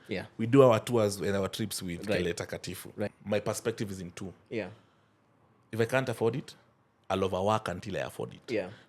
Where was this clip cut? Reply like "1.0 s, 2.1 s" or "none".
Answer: 3.2 s